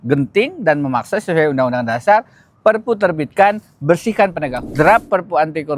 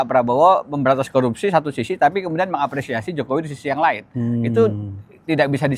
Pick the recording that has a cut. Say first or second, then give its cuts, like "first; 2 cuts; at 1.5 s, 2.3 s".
first; 1 cut; at 4.7 s